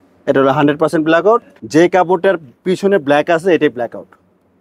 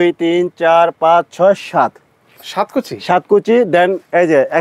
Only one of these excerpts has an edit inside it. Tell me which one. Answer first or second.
first